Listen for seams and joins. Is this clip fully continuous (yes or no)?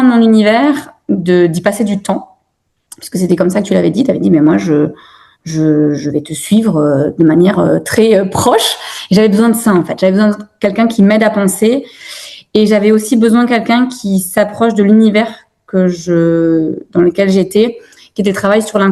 yes